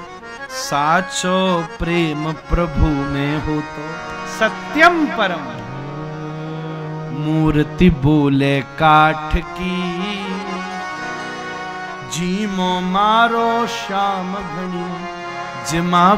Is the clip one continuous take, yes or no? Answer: yes